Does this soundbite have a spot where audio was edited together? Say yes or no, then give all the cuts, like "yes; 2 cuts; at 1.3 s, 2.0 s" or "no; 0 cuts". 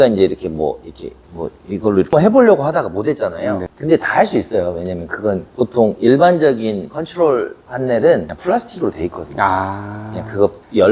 no; 0 cuts